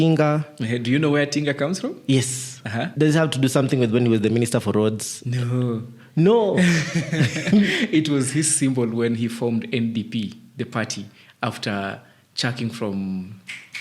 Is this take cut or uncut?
cut